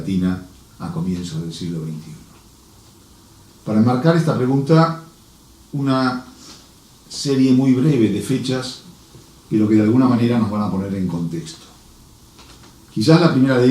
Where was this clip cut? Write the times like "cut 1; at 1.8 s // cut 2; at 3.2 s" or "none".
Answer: cut 1; at 7.9 s